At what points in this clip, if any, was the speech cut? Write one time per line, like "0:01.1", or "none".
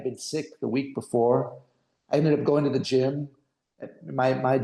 none